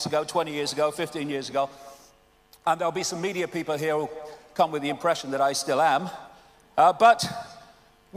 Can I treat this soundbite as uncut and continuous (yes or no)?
no